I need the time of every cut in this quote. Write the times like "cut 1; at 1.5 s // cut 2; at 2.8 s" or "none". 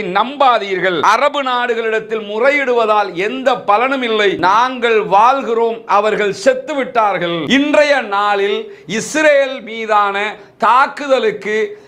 cut 1; at 1.0 s // cut 2; at 4.4 s // cut 3; at 7.4 s